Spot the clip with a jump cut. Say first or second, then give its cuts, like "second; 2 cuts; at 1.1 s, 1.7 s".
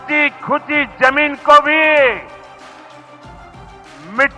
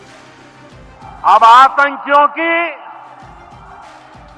second; 1 cut; at 1.0 s